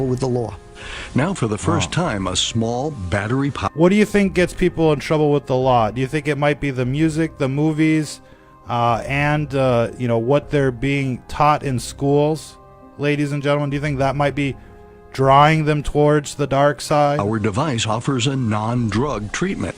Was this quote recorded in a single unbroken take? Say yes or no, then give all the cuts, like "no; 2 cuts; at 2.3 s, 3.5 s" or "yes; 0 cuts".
yes; 0 cuts